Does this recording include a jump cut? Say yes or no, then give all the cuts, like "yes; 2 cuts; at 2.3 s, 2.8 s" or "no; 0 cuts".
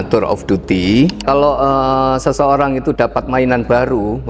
yes; 1 cut; at 1.2 s